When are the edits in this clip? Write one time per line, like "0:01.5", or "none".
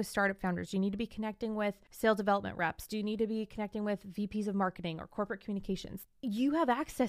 0:01.9
0:05.9